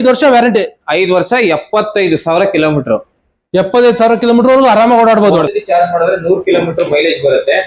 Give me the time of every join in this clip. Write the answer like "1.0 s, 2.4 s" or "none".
5.6 s